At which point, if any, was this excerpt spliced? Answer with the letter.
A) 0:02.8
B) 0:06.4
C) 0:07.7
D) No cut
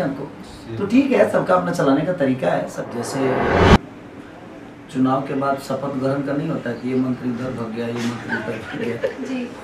A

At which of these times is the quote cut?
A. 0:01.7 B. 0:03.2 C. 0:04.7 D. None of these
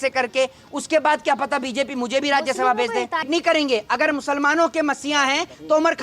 B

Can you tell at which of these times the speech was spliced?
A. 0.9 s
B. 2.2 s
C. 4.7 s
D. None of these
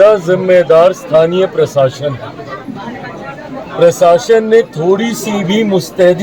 D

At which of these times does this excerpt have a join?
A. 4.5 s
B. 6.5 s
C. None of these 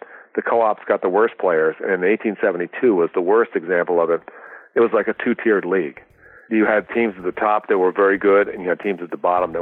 B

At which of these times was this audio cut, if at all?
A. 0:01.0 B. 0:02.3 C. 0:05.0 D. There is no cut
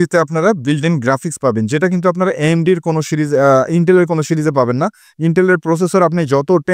D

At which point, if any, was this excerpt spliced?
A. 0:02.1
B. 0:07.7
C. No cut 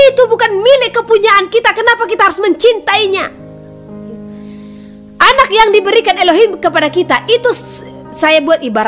C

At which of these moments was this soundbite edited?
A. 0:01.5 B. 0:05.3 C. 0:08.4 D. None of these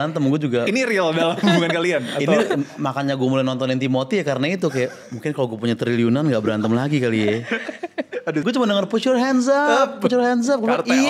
C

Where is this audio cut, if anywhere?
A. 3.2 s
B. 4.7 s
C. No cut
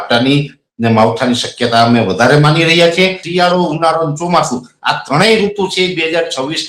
A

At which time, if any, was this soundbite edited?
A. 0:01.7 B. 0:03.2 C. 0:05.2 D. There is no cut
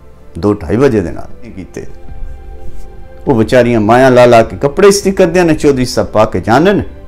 A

